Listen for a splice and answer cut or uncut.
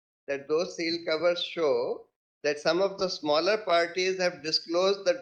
uncut